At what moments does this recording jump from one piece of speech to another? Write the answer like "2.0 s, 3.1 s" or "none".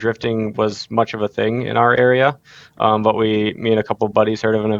none